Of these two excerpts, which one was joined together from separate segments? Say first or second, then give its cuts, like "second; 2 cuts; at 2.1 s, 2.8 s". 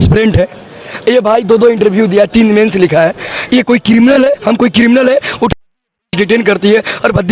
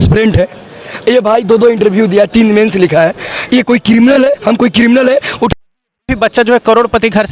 second; 1 cut; at 6.1 s